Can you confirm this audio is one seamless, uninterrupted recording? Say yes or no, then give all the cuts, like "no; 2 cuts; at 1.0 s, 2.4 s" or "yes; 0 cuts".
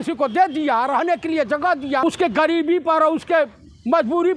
no; 1 cut; at 2.0 s